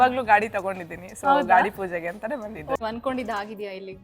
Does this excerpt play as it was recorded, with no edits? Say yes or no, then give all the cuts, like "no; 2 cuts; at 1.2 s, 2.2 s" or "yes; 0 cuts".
no; 1 cut; at 2.8 s